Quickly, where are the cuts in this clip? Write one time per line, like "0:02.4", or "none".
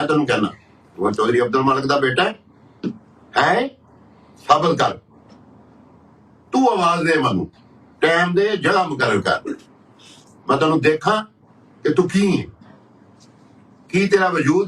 none